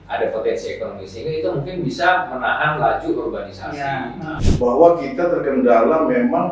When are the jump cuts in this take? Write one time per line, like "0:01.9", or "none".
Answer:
0:04.4

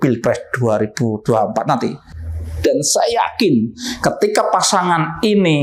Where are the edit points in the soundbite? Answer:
none

